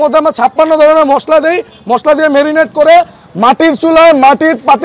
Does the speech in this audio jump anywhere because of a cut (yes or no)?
no